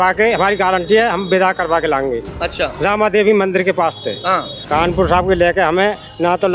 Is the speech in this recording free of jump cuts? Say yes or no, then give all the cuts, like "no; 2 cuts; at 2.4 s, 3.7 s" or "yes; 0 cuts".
no; 1 cut; at 4.5 s